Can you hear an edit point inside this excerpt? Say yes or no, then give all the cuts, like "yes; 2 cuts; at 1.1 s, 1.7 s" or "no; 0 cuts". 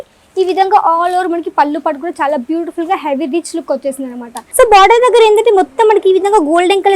yes; 1 cut; at 4.3 s